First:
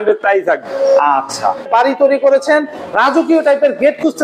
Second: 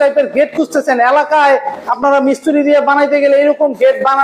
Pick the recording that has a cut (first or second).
first